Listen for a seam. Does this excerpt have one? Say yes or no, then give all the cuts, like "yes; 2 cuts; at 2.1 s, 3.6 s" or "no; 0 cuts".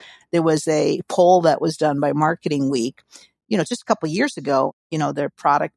yes; 1 cut; at 4.8 s